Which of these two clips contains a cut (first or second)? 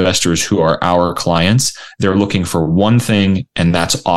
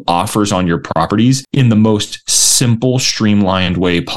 second